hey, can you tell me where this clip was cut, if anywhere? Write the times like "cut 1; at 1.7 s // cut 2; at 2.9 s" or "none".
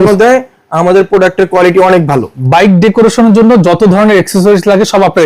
cut 1; at 2.4 s

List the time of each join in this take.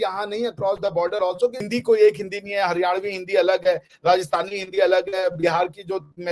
cut 1; at 1.6 s

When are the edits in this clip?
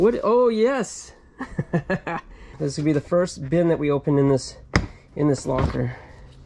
cut 1; at 2.5 s

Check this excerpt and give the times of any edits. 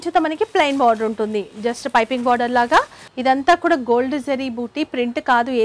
cut 1; at 3.1 s

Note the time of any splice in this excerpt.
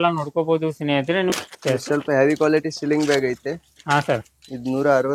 cut 1; at 1.3 s

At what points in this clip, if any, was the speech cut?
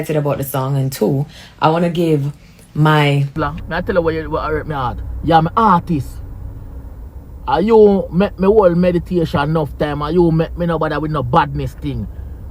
cut 1; at 3.4 s

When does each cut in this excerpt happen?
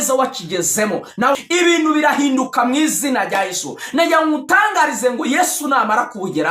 cut 1; at 1.3 s

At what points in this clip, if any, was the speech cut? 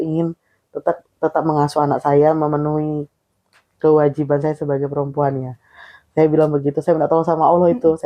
none

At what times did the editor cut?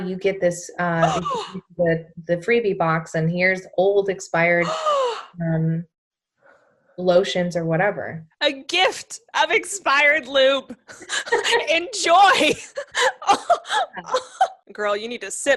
cut 1; at 14.6 s

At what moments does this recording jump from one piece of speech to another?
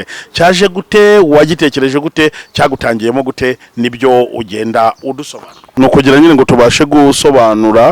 cut 1; at 5.6 s

